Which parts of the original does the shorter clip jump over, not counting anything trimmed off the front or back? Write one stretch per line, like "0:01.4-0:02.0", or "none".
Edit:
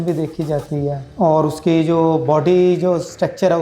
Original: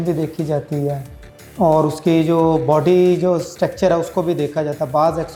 0:01.0-0:01.4